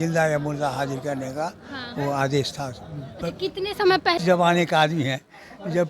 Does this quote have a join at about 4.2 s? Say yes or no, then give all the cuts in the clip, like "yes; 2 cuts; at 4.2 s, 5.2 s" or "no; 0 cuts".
yes; 1 cut; at 4.2 s